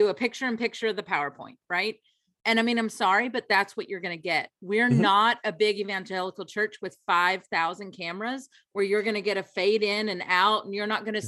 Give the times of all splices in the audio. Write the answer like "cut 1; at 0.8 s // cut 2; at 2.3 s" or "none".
none